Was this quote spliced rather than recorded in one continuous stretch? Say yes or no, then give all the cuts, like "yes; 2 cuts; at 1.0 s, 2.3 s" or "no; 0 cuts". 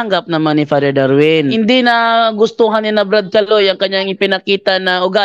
yes; 1 cut; at 1.5 s